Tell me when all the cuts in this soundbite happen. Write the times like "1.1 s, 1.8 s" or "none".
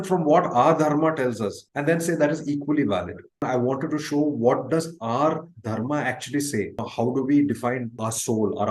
3.4 s, 6.9 s, 8.0 s